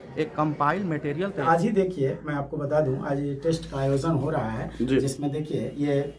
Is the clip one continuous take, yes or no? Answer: no